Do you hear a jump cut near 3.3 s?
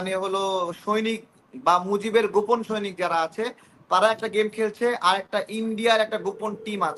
no; 0 cuts

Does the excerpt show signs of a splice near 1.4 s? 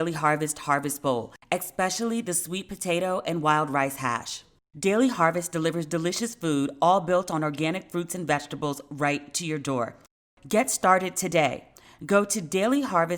no; 1 cut; at 10.2 s

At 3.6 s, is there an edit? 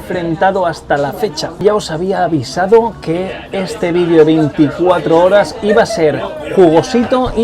no; 1 cut; at 1.6 s

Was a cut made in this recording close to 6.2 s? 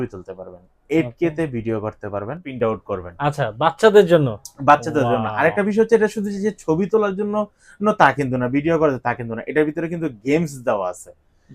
no; 1 cut; at 2.5 s

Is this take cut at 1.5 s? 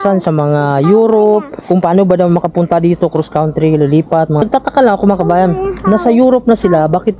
yes; 2 cuts; at 1.5 s, 4.4 s

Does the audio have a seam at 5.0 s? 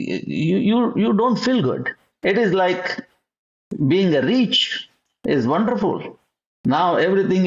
no; 1 cut; at 2.0 s

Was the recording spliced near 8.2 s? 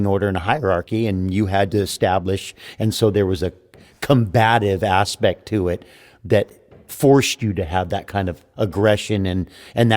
yes; 1 cut; at 8.2 s

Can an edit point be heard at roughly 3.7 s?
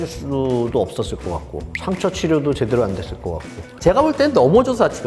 yes; 1 cut; at 3.7 s

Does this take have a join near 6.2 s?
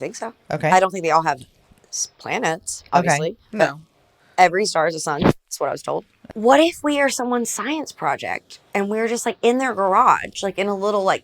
yes; 1 cut; at 6.2 s

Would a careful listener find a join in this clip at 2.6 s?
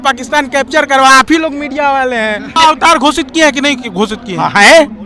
yes; 1 cut; at 2.6 s

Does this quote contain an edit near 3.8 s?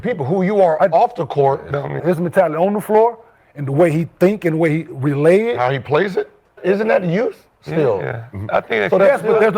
no; 2 cuts; at 2.0 s, 6.5 s

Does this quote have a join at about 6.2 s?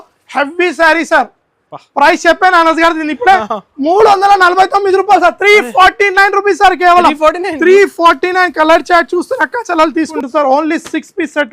no; 1 cut; at 10.1 s

